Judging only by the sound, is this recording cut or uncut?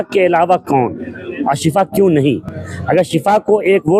uncut